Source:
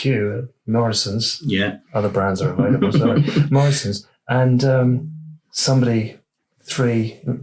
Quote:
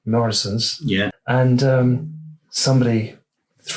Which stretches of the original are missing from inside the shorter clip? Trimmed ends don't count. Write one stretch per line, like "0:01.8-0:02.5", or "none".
0:01.8-0:04.2